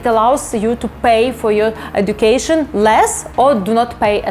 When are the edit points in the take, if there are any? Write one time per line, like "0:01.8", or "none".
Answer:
none